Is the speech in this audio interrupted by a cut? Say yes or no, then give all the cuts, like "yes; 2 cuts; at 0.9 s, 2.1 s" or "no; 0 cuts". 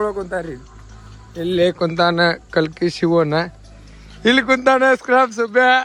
no; 0 cuts